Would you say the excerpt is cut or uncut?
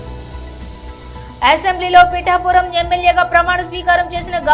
cut